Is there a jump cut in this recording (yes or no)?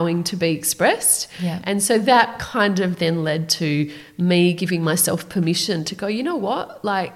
no